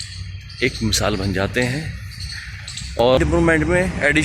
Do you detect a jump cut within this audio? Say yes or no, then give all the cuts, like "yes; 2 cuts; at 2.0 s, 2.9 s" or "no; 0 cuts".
yes; 1 cut; at 3.2 s